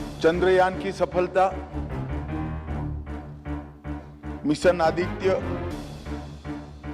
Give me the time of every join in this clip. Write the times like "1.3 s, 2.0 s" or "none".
1.7 s, 4.4 s, 5.4 s